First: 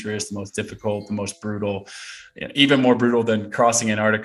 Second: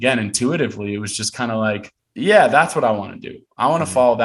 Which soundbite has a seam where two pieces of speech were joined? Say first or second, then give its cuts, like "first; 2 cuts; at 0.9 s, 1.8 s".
second; 1 cut; at 2.0 s